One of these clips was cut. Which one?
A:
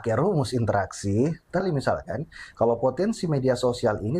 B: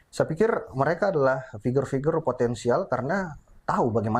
A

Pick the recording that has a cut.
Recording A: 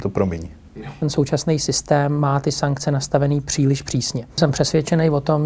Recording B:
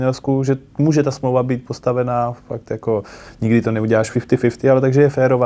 A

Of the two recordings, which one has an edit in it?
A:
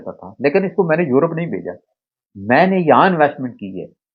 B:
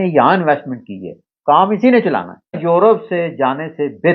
B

